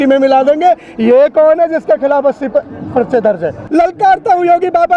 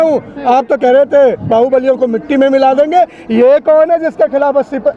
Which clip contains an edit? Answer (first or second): first